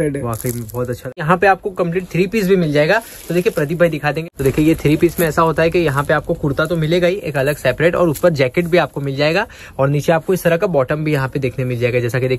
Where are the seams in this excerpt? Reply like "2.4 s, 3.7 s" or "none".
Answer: 1.2 s, 4.2 s